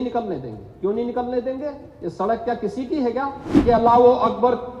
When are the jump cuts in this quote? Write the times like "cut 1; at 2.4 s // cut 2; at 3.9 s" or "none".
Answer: cut 1; at 3.5 s

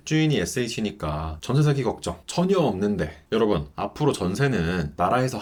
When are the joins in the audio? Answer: none

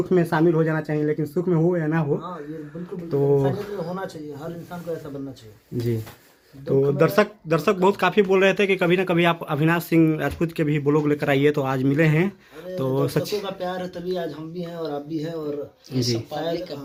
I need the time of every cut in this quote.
none

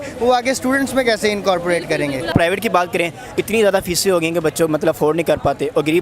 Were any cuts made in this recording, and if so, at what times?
cut 1; at 2.3 s

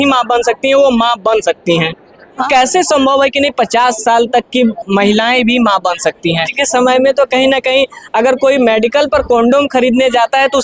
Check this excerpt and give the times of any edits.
cut 1; at 2.5 s // cut 2; at 6.5 s

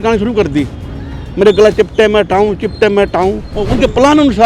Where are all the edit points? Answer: cut 1; at 3.5 s

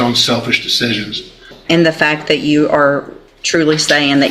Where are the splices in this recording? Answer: cut 1; at 1.5 s

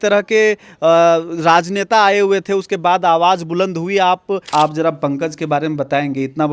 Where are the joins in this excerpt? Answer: cut 1; at 4.5 s

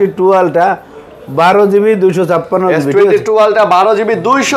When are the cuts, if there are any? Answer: none

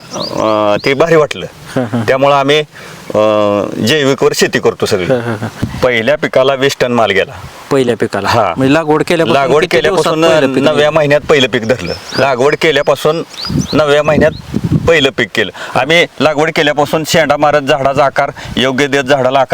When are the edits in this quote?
cut 1; at 5.7 s

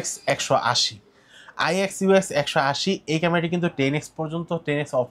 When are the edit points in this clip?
none

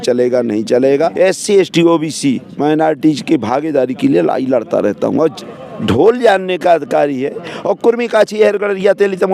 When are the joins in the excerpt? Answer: cut 1; at 1.1 s // cut 2; at 5.4 s

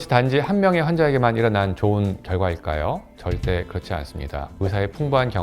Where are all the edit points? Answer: cut 1; at 4.5 s

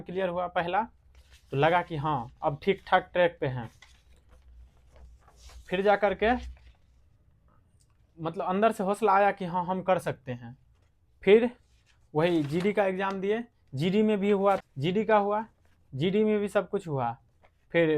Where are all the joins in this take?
none

